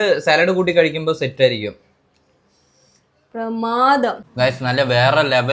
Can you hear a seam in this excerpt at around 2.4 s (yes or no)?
no